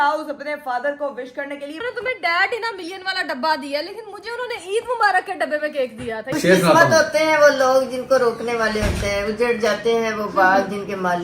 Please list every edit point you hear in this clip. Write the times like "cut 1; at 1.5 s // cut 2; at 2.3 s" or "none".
cut 1; at 1.8 s // cut 2; at 6.3 s